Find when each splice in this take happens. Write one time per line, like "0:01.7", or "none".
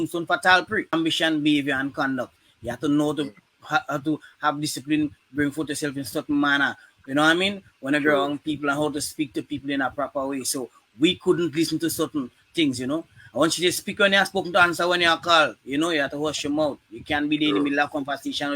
0:00.9